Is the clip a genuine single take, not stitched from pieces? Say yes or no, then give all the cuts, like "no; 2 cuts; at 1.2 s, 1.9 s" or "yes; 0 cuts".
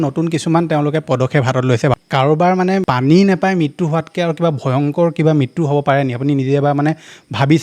no; 2 cuts; at 2.0 s, 2.8 s